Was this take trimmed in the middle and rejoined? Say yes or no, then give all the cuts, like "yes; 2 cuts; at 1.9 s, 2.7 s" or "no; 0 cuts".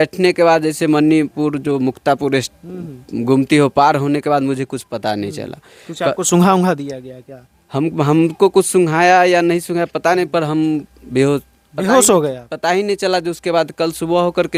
no; 0 cuts